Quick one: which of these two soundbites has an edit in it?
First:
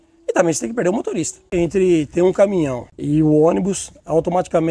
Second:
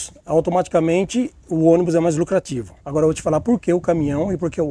first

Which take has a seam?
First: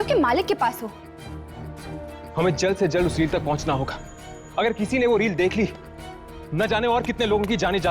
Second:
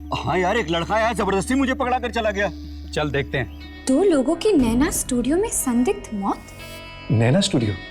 second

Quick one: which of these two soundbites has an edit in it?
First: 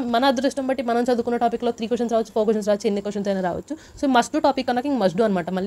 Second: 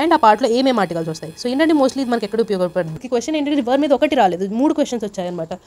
second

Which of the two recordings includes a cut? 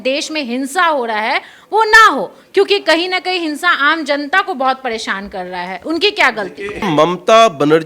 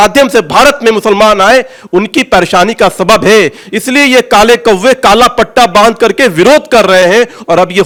first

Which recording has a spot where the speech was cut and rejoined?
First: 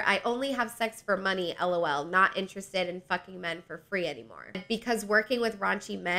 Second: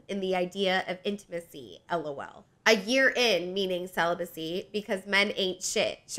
first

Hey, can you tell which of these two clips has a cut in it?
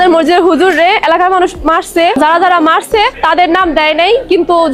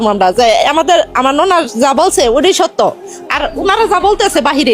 first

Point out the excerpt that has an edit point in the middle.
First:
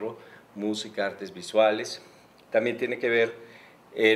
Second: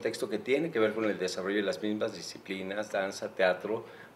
second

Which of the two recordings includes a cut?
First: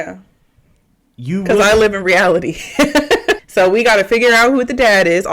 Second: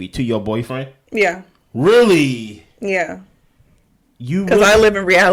first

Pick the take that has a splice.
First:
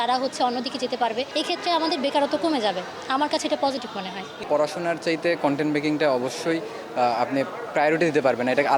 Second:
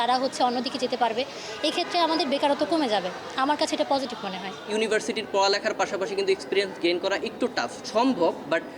first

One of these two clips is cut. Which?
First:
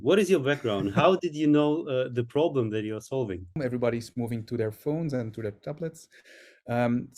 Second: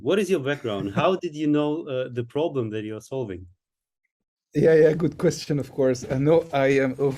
first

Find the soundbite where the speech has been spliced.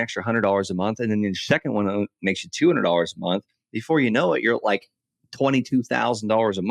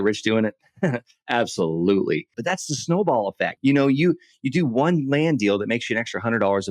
second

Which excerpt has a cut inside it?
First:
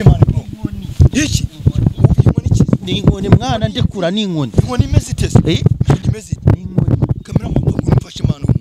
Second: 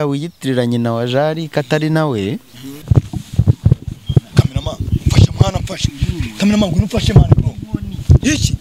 second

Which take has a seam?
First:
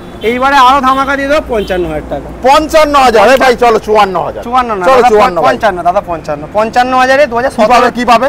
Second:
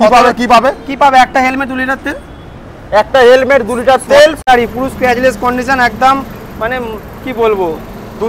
second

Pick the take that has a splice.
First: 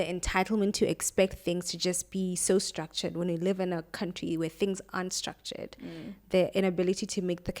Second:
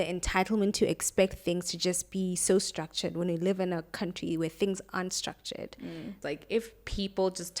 second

